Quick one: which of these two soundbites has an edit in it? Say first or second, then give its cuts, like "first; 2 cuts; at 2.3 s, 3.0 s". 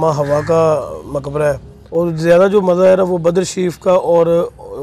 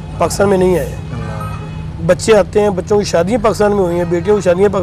first; 1 cut; at 1.7 s